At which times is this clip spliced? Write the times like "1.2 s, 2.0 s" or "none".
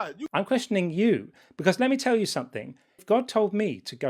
2.9 s